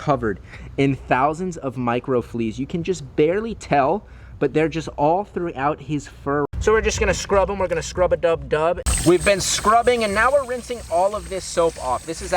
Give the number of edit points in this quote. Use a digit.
2